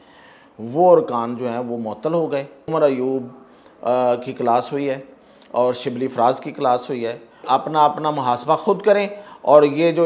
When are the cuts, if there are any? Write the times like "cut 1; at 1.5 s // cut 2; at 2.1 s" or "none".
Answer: cut 1; at 2.7 s // cut 2; at 7.4 s